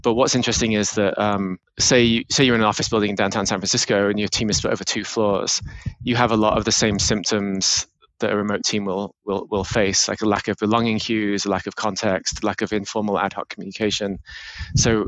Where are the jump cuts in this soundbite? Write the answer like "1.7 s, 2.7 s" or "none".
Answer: 1.7 s